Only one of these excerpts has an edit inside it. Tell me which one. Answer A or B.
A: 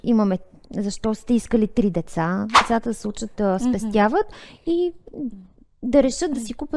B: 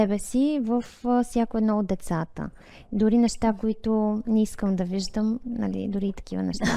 A